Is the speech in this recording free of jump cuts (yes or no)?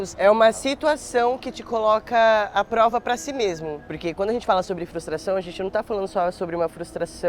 no